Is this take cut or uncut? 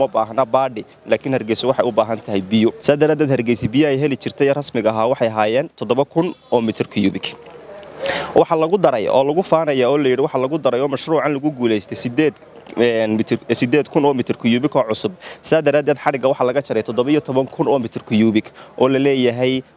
cut